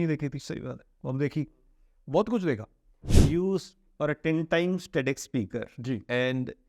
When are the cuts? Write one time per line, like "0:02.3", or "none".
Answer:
0:03.1